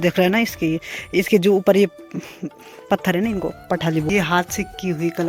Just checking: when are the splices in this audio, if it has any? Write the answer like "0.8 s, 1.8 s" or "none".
4.1 s

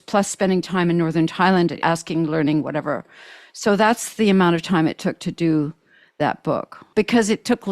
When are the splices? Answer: 1.8 s, 6.8 s

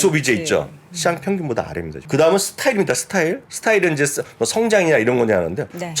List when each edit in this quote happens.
2.0 s, 3.5 s

